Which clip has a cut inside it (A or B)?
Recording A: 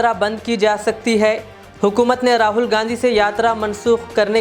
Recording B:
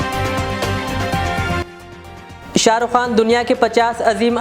B